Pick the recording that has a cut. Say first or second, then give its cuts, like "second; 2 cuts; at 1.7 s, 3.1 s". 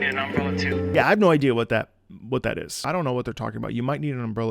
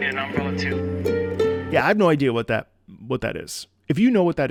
first; 2 cuts; at 0.9 s, 2.8 s